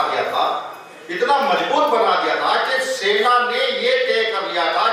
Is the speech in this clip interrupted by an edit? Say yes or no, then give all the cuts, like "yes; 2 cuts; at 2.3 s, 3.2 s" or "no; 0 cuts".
no; 0 cuts